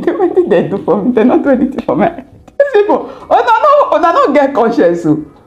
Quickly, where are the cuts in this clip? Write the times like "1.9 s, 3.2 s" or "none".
2.6 s